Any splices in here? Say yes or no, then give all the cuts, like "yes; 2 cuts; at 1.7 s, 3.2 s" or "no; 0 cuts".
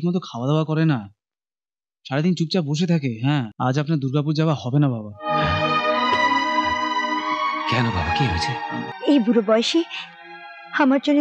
yes; 2 cuts; at 3.5 s, 8.9 s